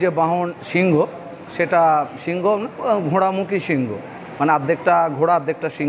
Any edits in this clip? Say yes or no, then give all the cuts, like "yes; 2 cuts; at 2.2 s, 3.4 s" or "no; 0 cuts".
no; 0 cuts